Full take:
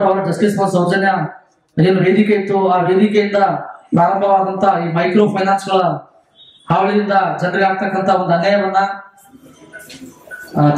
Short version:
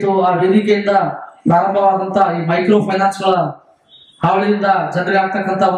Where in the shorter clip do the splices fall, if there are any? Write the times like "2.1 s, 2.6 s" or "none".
none